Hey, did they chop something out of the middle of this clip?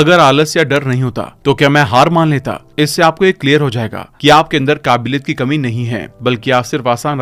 no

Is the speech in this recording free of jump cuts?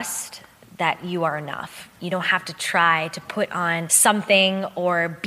no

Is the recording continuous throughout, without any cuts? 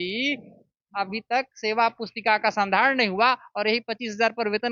yes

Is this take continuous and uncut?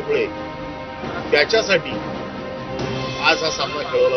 yes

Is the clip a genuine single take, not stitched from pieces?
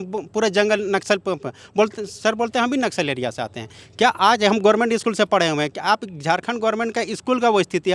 yes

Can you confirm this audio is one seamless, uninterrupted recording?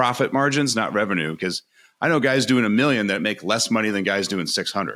yes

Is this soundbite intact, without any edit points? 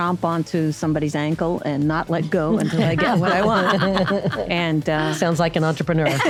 yes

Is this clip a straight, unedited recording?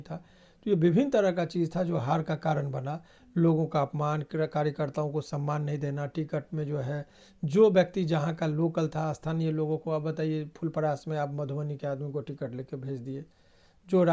yes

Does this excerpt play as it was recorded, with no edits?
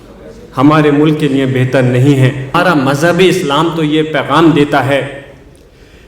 no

